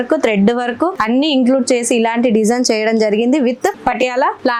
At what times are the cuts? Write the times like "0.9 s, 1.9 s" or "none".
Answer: none

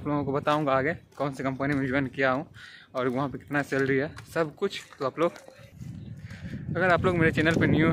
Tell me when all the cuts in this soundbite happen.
none

